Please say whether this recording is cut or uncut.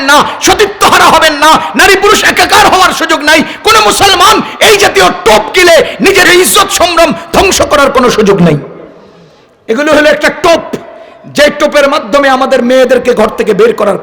cut